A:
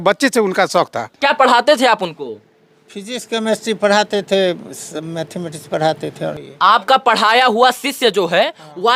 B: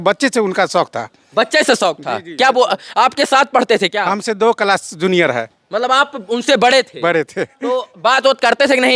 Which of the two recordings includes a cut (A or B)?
A